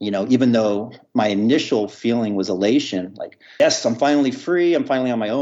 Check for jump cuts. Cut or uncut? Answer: uncut